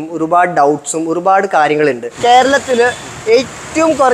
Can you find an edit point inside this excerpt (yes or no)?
yes